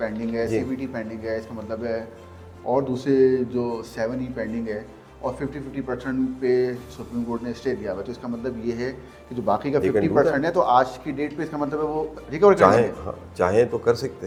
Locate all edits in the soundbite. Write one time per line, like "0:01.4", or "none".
none

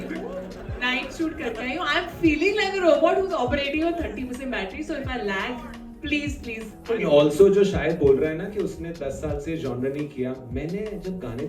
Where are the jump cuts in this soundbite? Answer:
none

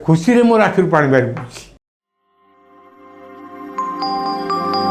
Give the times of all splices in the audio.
0:01.8

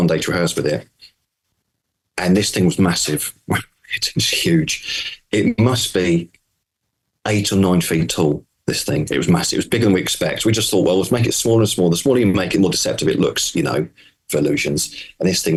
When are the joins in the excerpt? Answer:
none

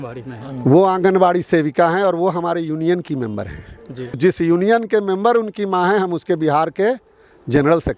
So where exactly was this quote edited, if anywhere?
0:04.2

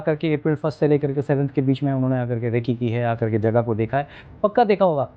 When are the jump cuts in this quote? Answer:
none

